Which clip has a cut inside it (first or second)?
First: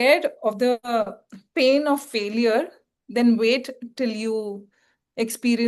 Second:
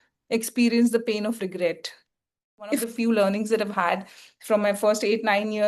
second